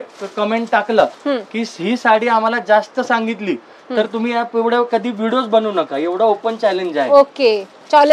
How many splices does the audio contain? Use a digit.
0